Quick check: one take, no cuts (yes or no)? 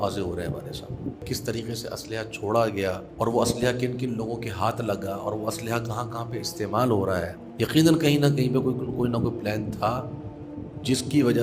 no